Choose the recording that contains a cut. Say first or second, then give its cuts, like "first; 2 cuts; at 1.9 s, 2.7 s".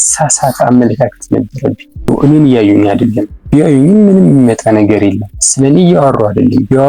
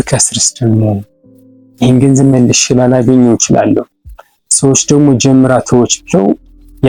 first; 1 cut; at 2.1 s